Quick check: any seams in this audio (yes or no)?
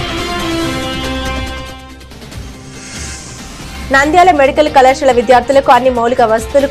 no